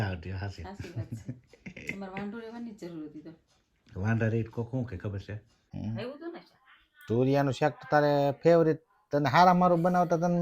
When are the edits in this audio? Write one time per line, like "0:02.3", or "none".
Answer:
0:05.5